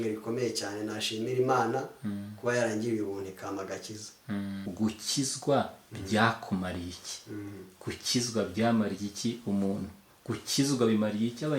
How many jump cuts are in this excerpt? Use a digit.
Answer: 1